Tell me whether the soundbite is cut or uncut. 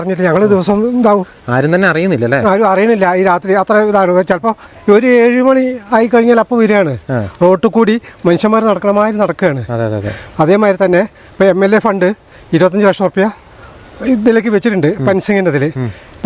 uncut